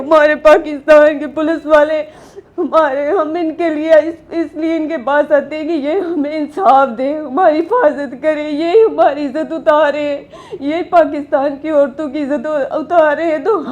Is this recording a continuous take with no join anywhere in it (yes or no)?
yes